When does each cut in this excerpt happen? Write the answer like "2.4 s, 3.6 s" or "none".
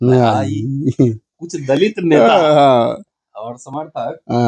1.3 s